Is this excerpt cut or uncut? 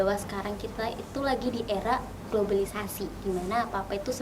uncut